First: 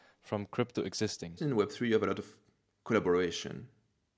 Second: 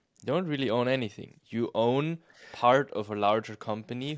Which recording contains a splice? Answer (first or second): first